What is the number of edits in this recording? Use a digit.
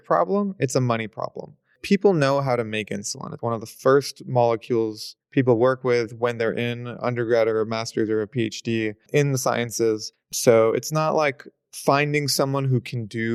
0